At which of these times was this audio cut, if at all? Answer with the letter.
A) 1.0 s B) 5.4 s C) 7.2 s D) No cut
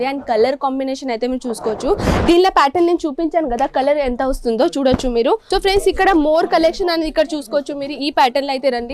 B